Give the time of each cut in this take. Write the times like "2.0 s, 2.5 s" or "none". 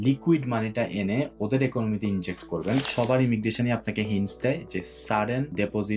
2.9 s